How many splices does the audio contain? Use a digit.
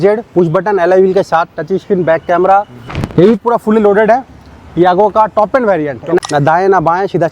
1